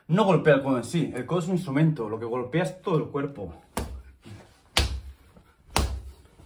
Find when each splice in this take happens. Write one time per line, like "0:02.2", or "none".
none